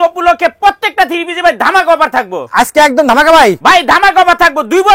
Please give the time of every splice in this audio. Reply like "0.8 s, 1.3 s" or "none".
none